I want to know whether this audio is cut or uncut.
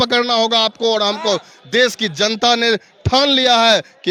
uncut